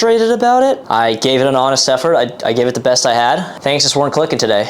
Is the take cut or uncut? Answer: cut